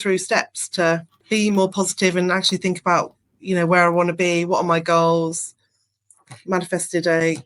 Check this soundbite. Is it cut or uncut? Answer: cut